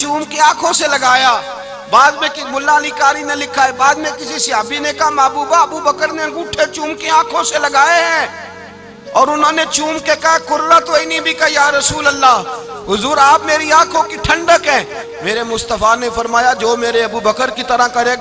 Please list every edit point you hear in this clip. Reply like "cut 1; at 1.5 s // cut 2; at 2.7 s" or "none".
none